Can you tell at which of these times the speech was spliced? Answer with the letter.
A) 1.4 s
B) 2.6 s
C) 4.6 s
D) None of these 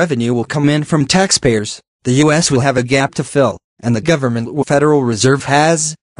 D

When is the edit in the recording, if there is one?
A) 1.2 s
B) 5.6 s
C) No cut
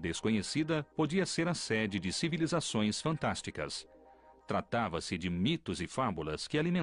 B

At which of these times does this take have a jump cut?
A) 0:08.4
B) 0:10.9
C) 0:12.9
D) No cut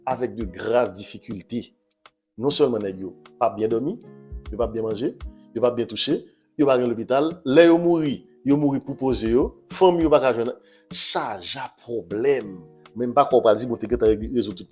B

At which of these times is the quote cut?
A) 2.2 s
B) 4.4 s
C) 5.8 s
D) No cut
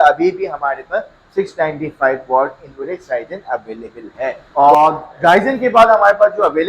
B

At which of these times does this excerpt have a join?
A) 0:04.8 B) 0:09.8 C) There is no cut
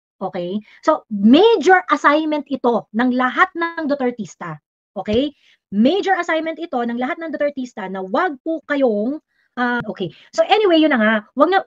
B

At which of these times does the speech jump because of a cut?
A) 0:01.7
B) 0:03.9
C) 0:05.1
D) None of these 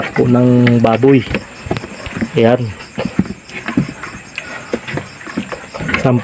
D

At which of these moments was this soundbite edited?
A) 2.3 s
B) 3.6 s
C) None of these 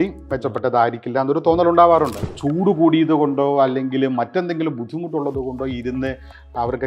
A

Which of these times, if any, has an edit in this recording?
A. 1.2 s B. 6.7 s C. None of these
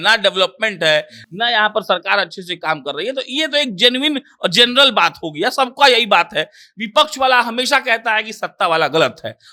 C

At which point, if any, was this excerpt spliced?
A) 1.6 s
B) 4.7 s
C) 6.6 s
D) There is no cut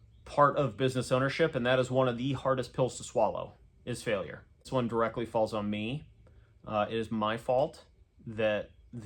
B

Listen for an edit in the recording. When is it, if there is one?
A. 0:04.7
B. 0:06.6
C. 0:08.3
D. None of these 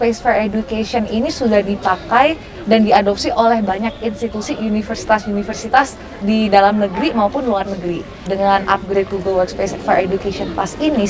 C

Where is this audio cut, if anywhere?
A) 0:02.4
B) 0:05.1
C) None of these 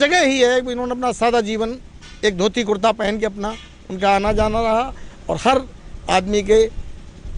C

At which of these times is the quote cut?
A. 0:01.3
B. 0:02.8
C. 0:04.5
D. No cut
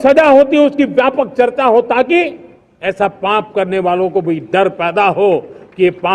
D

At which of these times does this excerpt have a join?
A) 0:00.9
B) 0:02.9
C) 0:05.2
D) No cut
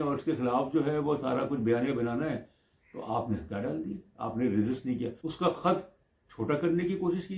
C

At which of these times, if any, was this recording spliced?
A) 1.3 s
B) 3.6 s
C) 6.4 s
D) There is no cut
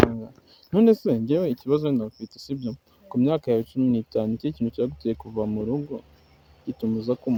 D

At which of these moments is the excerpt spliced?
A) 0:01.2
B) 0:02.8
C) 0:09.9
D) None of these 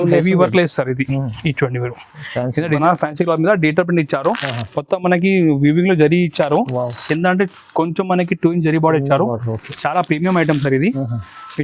B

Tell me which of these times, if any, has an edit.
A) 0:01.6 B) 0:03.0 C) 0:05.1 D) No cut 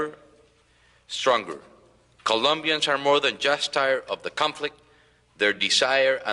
A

